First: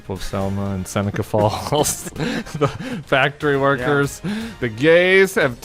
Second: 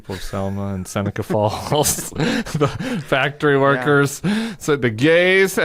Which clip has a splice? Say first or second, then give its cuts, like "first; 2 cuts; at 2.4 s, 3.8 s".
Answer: first; 1 cut; at 4.6 s